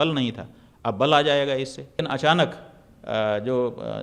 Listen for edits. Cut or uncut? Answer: cut